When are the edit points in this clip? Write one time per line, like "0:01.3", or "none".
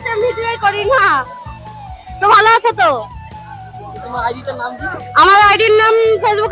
none